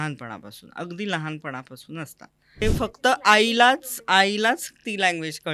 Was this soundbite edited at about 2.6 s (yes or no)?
yes